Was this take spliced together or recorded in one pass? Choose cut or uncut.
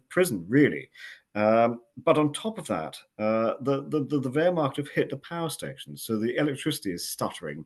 uncut